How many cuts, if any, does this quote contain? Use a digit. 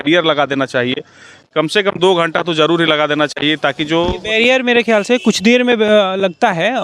0